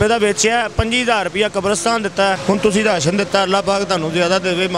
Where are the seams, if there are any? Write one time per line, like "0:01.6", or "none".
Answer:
0:02.4